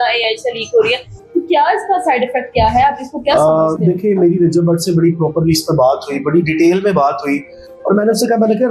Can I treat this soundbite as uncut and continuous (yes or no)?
yes